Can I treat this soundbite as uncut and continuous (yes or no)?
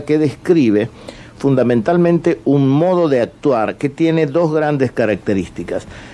no